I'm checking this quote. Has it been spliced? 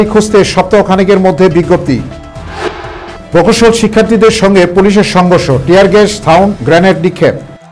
no; 0 cuts

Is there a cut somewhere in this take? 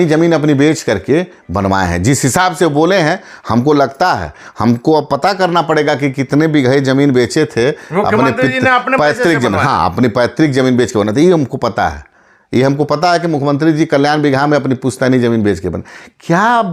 no; 0 cuts

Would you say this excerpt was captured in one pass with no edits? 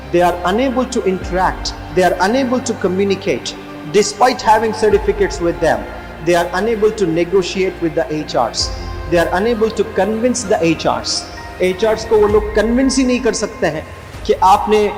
yes; 0 cuts

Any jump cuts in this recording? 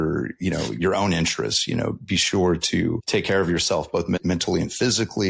yes; 2 cuts; at 3.0 s, 4.2 s

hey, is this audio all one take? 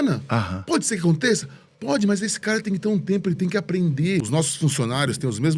no; 1 cut; at 4.2 s

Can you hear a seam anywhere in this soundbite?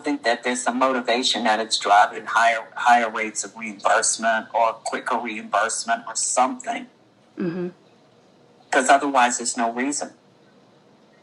no; 0 cuts

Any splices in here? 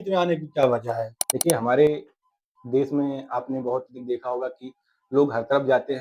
no; 0 cuts

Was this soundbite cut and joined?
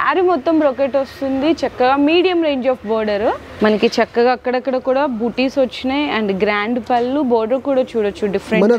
yes; 1 cut; at 3.5 s

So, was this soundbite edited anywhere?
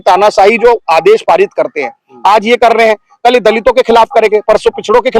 no; 0 cuts

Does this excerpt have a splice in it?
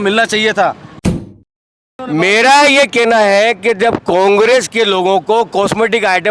yes; 1 cut; at 1.4 s

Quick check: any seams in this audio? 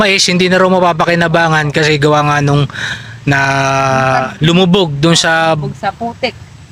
no; 0 cuts

